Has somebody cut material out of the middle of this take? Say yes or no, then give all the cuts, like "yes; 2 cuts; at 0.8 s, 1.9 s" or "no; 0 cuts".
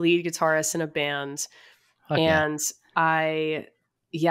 no; 0 cuts